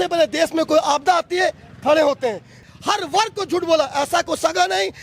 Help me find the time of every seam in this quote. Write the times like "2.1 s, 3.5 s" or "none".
2.6 s